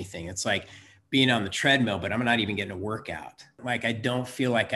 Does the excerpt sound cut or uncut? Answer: cut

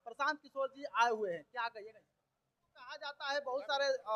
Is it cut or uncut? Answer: cut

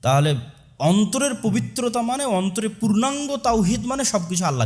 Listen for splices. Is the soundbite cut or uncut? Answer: uncut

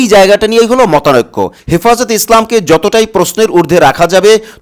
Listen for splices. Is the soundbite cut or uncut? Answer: cut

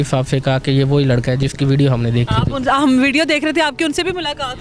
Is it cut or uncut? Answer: uncut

